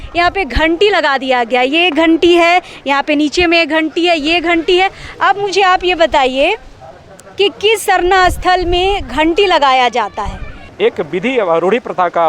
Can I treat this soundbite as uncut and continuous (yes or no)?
no